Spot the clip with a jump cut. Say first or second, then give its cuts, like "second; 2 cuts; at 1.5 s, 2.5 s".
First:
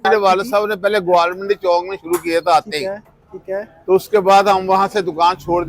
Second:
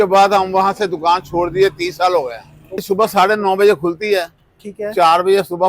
second; 1 cut; at 2.8 s